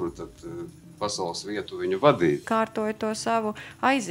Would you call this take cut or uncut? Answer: cut